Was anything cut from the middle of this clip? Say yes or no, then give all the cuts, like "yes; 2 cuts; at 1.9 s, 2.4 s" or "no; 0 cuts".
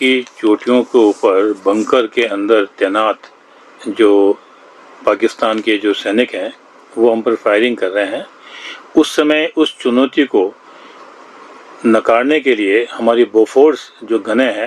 no; 0 cuts